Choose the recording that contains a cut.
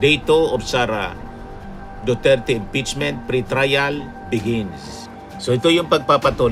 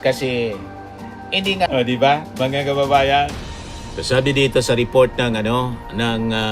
second; 1 cut; at 1.7 s

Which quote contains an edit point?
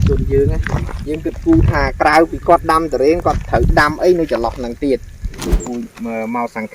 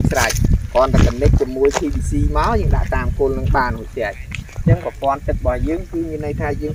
first; 1 cut; at 5.5 s

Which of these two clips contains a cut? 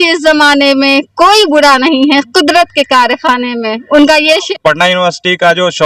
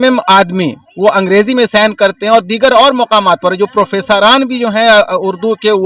first; 1 cut; at 4.5 s

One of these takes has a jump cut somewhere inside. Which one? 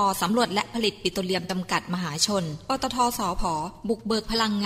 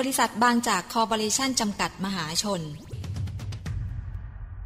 second; 1 cut; at 3.0 s

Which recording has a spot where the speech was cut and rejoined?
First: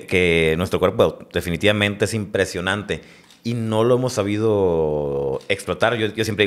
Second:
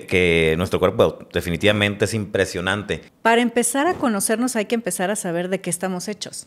second; 1 cut; at 3.1 s

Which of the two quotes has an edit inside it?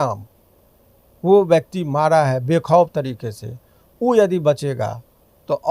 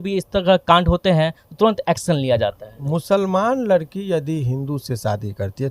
second; 1 cut; at 2.9 s

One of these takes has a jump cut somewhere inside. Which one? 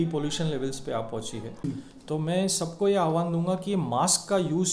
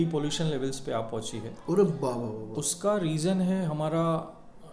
first; 1 cut; at 1.5 s

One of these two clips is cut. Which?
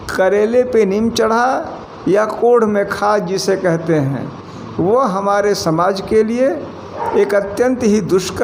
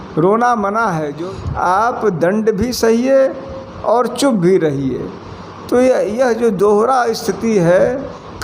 second; 1 cut; at 1.1 s

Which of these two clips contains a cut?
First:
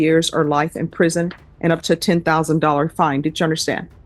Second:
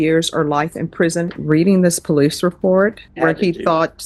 second; 2 cuts; at 1.4 s, 3.0 s

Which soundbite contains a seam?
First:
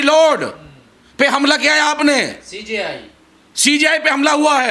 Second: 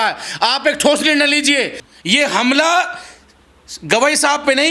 second; 1 cut; at 1.8 s

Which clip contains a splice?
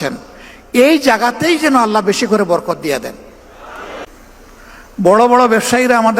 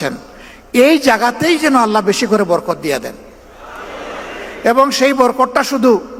first; 1 cut; at 4.1 s

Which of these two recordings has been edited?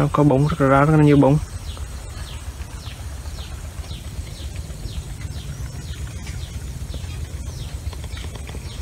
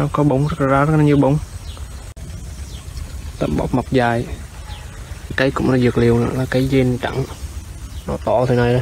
second; 2 cuts; at 2.1 s, 5.4 s

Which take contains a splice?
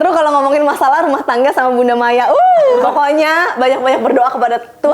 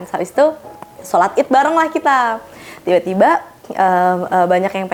first; 1 cut; at 2.9 s

